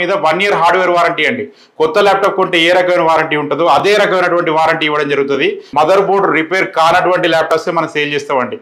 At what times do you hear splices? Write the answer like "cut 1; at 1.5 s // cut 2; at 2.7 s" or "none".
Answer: cut 1; at 5.7 s